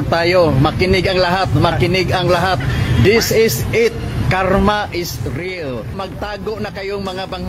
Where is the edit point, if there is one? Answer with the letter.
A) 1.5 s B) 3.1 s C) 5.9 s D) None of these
C